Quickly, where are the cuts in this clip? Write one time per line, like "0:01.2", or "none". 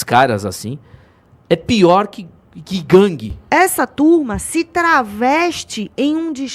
0:03.3